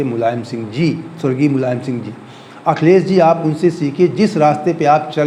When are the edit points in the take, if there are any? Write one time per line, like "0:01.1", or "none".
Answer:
none